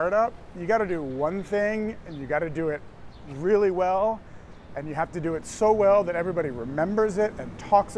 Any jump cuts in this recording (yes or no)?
no